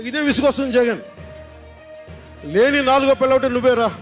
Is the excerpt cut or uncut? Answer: uncut